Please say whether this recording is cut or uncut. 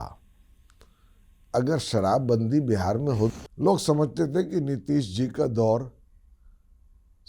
cut